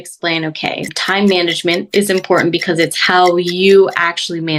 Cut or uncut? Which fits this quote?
uncut